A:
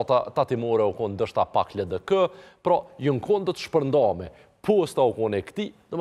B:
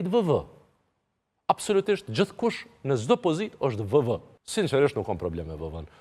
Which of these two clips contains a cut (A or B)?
B